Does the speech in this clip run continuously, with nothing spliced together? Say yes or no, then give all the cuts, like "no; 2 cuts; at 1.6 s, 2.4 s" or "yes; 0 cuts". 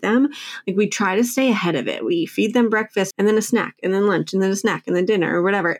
no; 1 cut; at 3.1 s